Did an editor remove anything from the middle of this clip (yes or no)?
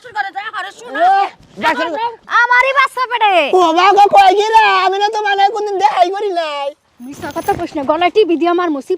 yes